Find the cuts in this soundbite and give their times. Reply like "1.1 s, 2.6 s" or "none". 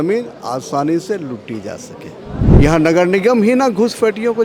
2.5 s